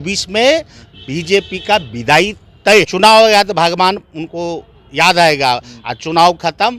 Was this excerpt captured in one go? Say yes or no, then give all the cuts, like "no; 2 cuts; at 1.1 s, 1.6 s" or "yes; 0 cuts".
no; 1 cut; at 2.9 s